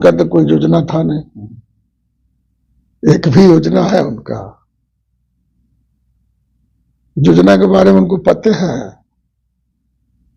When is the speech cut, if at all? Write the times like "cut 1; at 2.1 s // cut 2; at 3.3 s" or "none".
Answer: none